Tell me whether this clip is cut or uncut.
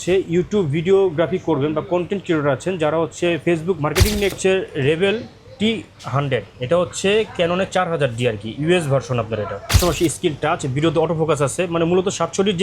cut